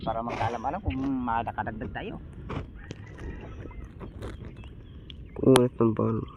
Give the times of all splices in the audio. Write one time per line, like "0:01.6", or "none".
none